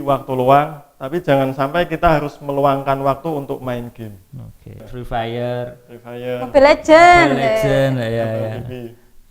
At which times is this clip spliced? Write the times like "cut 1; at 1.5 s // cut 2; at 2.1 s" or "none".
cut 1; at 4.9 s